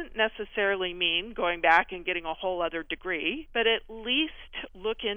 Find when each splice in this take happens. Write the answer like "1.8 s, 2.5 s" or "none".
3.4 s